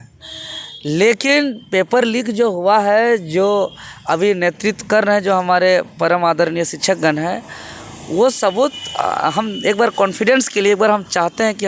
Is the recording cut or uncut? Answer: uncut